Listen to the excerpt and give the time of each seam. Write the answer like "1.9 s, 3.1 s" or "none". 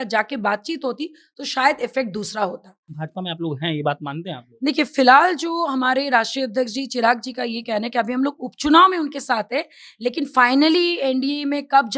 2.9 s